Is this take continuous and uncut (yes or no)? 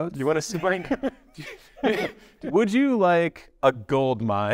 no